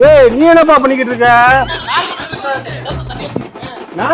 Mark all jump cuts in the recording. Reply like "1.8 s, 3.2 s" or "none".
1.8 s